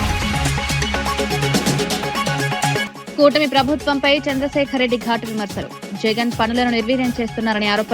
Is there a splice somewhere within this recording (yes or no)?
yes